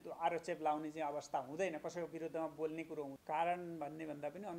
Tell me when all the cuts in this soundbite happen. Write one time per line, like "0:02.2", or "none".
0:03.1